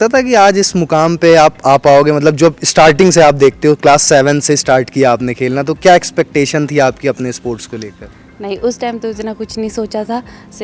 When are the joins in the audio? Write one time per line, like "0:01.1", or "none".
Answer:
none